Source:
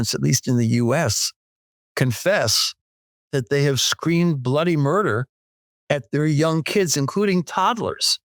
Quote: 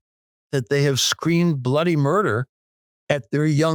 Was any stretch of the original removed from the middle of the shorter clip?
no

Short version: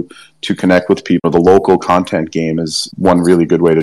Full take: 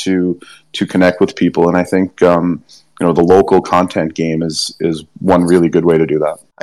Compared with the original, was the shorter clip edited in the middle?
yes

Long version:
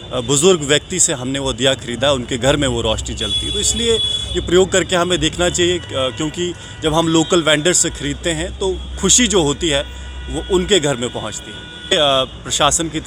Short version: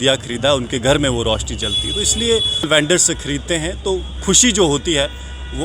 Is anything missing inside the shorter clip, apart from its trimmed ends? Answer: yes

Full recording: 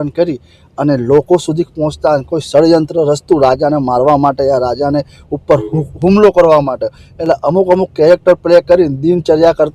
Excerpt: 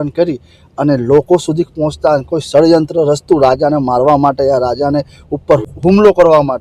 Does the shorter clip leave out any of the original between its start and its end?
yes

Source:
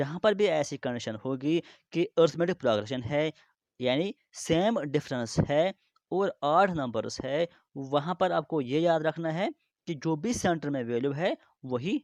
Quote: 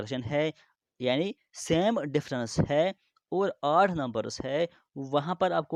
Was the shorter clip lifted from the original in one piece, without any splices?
yes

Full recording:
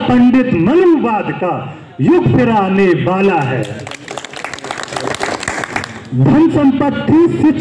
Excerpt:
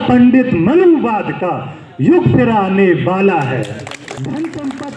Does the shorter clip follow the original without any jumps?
no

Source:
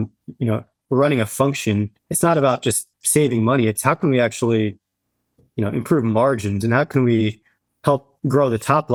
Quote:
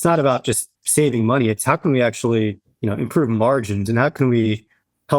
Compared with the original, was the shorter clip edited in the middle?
yes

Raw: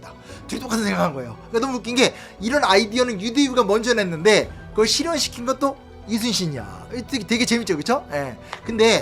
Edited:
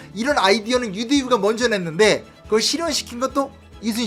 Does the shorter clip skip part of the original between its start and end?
no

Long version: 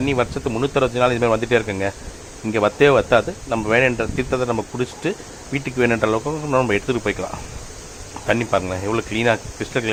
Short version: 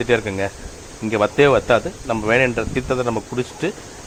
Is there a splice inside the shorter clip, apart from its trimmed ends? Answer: no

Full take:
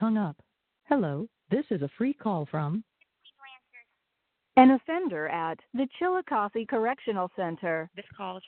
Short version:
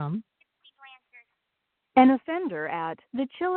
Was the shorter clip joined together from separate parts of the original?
no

